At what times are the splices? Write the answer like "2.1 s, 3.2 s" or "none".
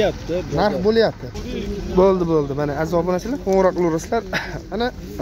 1.3 s